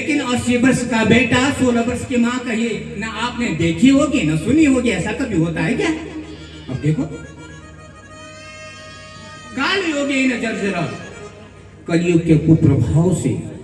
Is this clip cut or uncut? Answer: uncut